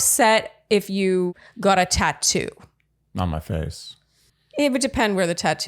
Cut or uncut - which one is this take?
cut